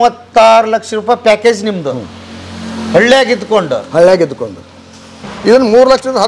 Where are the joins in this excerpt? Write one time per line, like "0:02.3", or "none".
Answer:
0:05.2

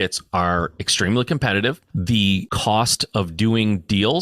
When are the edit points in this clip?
0:02.4

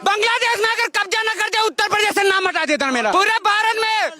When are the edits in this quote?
0:03.1

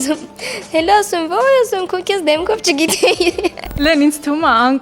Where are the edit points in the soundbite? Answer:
0:03.8

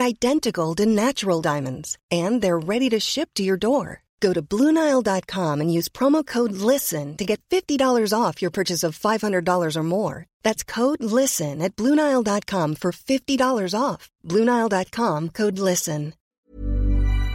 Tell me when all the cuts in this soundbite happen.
0:16.2

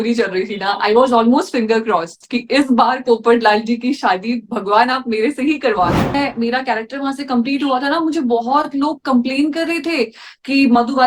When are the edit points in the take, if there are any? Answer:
0:06.1

